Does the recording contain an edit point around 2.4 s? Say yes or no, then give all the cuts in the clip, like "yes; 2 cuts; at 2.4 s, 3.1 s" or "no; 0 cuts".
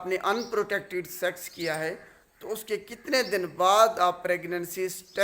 no; 0 cuts